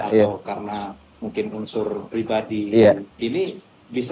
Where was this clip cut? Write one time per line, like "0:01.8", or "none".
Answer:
0:03.1